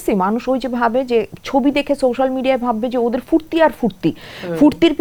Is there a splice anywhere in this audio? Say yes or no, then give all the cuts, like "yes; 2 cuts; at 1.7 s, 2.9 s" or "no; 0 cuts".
no; 0 cuts